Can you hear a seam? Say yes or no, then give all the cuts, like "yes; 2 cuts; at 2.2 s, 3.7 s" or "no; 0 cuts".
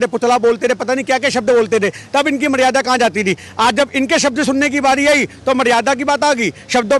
no; 0 cuts